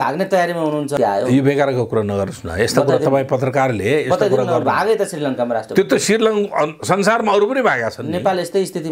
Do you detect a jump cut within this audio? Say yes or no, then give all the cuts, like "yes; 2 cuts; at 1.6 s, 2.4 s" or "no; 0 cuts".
yes; 1 cut; at 0.9 s